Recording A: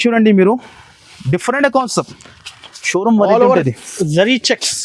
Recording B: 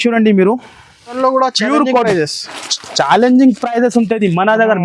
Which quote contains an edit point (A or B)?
B